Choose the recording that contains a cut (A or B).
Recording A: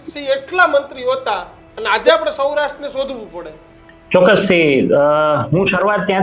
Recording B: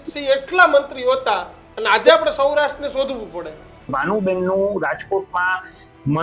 B